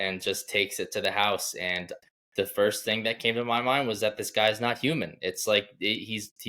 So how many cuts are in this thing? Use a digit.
1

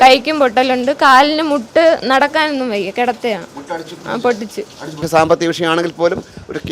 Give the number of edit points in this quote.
1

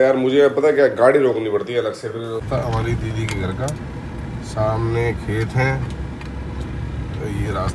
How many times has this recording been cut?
1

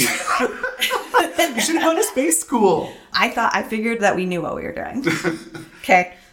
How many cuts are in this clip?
1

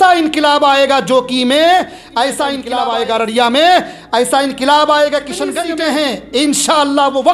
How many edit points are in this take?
2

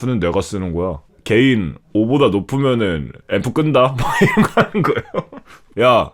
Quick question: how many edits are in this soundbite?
2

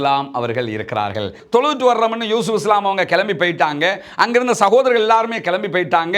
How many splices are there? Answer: 1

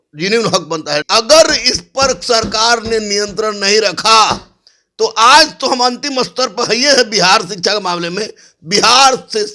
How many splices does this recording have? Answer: 1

